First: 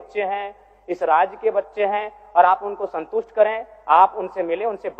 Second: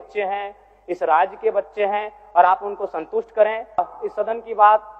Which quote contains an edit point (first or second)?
second